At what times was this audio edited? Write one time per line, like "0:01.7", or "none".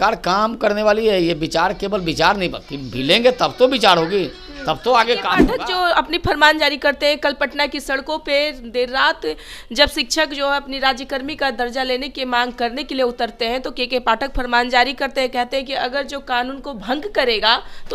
0:05.4